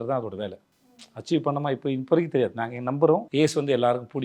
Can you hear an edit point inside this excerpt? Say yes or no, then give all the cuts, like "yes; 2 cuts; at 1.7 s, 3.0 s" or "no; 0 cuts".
yes; 1 cut; at 3.3 s